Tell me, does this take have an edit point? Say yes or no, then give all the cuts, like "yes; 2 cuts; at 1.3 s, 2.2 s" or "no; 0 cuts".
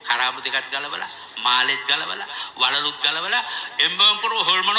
no; 0 cuts